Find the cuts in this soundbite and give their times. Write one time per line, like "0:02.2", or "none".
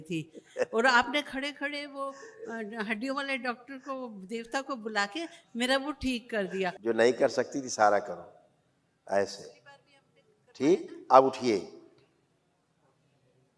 0:06.7